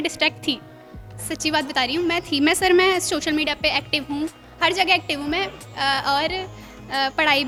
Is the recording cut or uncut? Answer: uncut